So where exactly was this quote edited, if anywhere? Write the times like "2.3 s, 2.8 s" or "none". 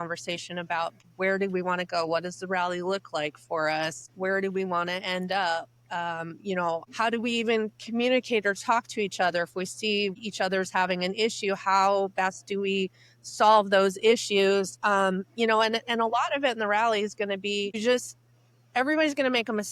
1.0 s, 4.0 s, 6.9 s, 10.1 s, 17.8 s